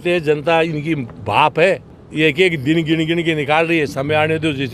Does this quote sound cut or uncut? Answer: uncut